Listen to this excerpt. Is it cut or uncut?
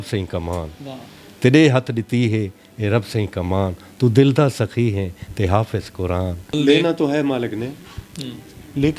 cut